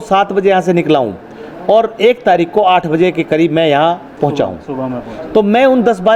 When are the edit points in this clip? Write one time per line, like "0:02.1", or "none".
none